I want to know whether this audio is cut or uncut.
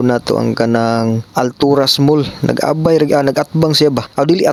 uncut